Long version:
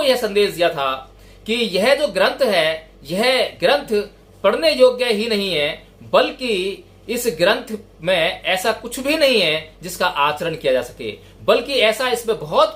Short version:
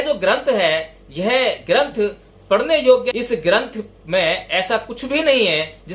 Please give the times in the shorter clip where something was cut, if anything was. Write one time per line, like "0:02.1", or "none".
0:03.1